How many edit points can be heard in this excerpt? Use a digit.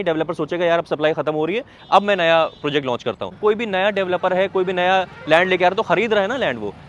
1